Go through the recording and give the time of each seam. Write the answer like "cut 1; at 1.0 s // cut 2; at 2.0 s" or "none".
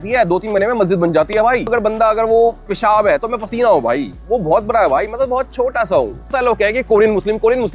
cut 1; at 1.7 s // cut 2; at 6.2 s